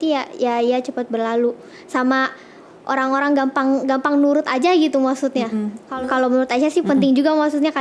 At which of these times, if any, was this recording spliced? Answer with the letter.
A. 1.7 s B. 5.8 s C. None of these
B